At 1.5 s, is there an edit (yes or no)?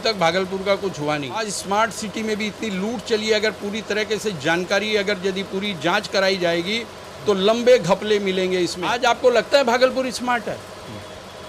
yes